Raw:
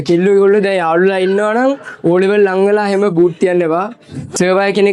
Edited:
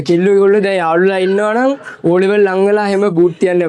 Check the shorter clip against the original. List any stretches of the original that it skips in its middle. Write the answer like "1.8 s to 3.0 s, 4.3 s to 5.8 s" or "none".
none